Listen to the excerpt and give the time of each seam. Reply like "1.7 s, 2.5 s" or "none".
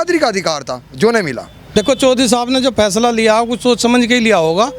1.6 s